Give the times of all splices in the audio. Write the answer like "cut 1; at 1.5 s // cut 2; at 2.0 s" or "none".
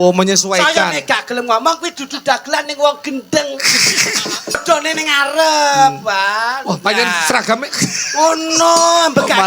cut 1; at 4.6 s